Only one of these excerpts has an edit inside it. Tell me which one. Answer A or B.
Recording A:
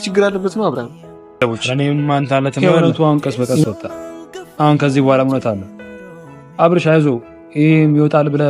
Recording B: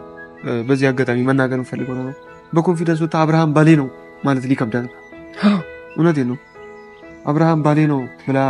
A